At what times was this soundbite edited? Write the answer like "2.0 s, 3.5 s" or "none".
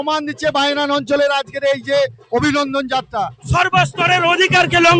3.4 s